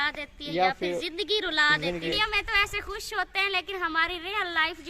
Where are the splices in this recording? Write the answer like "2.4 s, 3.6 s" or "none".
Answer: 2.1 s